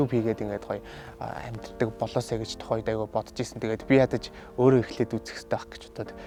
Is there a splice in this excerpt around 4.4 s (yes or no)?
no